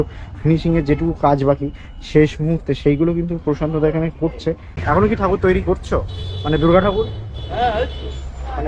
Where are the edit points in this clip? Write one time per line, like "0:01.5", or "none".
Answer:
0:04.7